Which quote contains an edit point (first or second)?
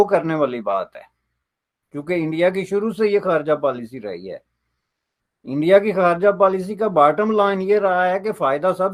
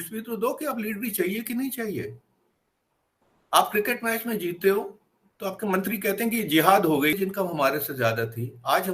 second